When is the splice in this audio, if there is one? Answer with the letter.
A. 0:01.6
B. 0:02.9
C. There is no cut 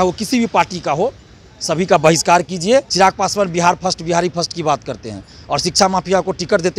B